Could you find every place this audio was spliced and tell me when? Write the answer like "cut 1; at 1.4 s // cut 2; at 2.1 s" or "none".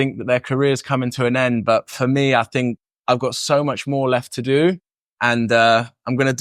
none